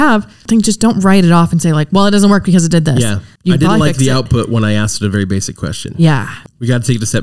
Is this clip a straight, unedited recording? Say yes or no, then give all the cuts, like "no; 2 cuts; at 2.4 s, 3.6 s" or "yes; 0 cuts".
no; 2 cuts; at 3.3 s, 6.3 s